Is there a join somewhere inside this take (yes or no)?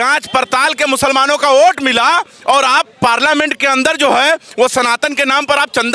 no